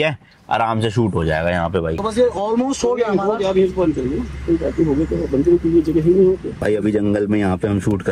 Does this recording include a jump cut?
yes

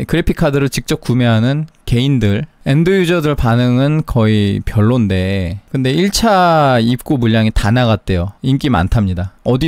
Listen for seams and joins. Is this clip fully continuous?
yes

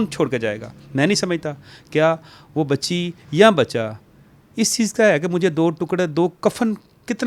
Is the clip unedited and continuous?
yes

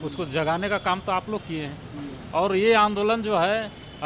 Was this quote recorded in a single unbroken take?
yes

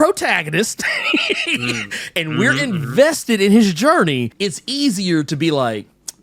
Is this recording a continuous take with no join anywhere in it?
no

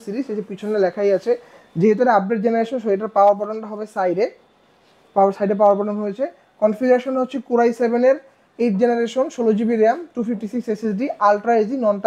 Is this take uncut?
yes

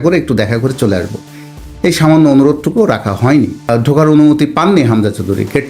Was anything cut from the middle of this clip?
yes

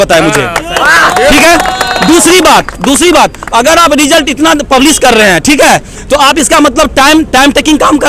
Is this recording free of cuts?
yes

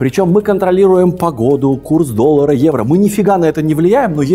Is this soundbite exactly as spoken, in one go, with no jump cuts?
yes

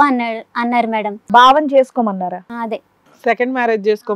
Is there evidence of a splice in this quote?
yes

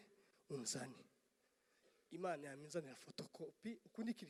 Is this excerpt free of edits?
yes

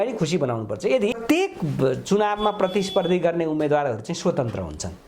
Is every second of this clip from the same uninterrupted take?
no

